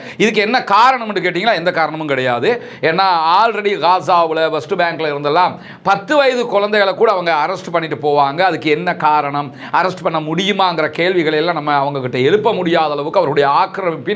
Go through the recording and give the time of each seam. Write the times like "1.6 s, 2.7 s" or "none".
none